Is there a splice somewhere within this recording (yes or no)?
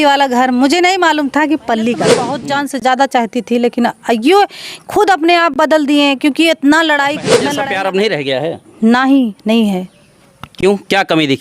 yes